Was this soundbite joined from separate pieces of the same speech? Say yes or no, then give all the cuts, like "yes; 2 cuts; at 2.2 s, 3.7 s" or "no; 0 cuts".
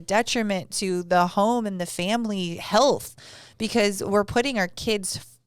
no; 0 cuts